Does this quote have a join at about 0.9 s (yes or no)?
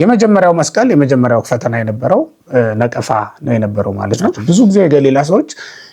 no